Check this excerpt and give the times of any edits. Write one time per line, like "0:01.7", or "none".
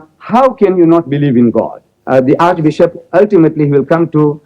0:01.9